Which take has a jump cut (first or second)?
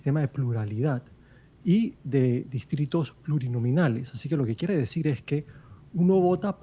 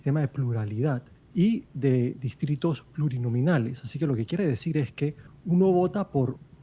second